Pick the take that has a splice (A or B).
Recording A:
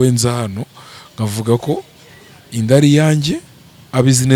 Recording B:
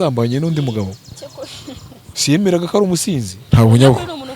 B